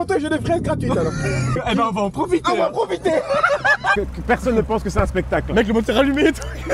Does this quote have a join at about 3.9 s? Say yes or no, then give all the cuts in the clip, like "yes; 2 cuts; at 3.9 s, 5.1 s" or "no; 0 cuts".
yes; 2 cuts; at 1.6 s, 3.9 s